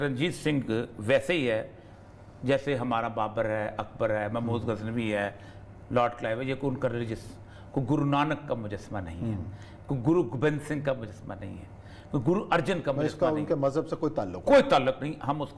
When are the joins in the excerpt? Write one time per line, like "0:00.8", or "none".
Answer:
none